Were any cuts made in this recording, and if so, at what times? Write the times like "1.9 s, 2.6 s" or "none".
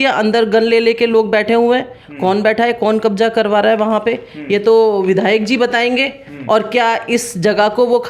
none